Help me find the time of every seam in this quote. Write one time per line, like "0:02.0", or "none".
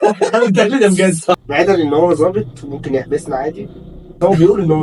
0:01.4